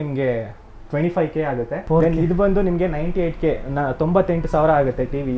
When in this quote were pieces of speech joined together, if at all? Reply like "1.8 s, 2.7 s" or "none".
1.8 s